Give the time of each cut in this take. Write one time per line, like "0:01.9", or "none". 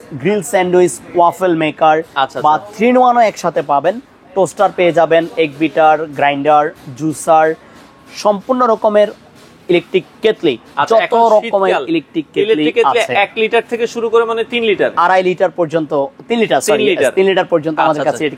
none